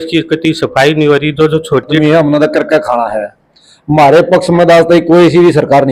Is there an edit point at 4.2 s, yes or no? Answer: no